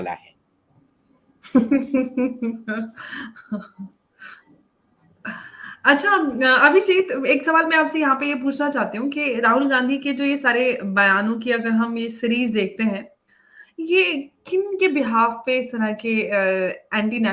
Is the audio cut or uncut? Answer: uncut